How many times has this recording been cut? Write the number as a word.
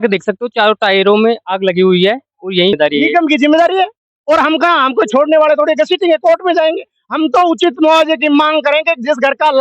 one